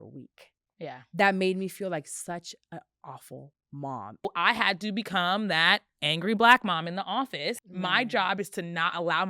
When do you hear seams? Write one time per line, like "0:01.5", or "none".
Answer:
0:04.2
0:07.7